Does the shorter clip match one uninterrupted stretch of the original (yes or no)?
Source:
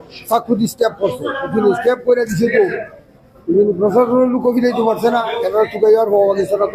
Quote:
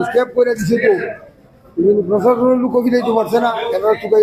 yes